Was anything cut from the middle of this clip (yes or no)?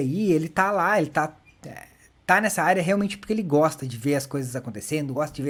no